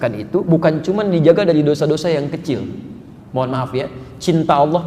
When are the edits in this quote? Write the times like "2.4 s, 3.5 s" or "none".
none